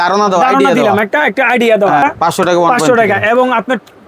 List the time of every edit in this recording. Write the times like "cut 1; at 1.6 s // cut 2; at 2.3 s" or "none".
cut 1; at 2.0 s